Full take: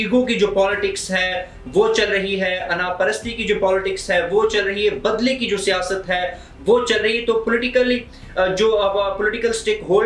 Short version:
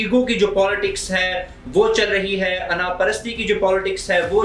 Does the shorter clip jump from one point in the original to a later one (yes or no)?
no